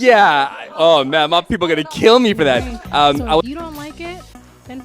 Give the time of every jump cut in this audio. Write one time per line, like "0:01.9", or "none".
0:03.4